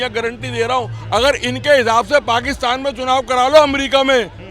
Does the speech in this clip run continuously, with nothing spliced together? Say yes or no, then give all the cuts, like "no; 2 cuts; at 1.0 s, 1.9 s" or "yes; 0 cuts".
yes; 0 cuts